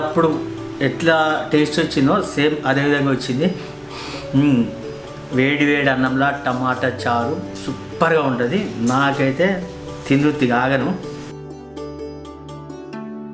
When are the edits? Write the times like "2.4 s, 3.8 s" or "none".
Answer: none